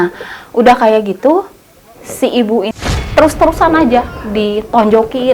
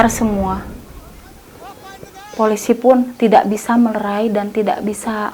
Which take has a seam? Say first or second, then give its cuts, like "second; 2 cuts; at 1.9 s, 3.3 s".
first; 1 cut; at 2.7 s